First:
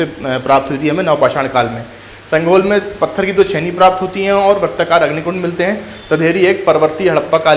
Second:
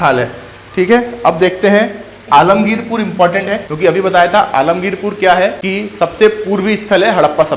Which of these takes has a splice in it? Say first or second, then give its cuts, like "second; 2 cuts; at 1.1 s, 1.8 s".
second; 3 cuts; at 2.2 s, 3.7 s, 5.6 s